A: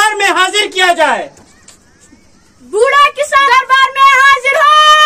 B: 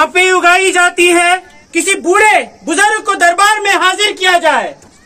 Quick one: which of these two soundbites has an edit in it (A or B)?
B